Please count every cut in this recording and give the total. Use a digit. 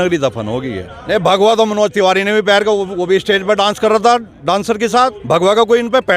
2